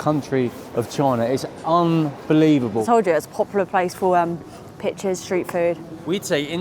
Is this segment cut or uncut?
cut